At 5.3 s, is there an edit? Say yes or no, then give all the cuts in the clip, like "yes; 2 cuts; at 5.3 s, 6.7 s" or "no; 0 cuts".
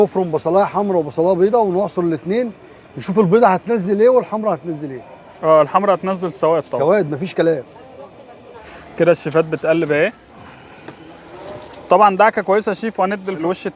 no; 0 cuts